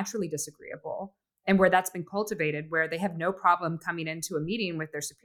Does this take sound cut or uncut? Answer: uncut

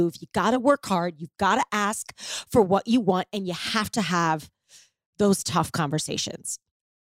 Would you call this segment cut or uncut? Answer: uncut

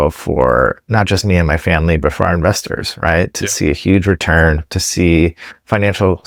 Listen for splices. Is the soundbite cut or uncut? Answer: uncut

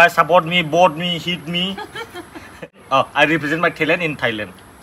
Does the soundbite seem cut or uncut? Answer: cut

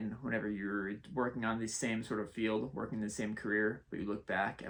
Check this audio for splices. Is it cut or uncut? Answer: uncut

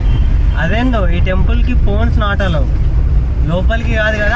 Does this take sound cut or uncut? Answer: uncut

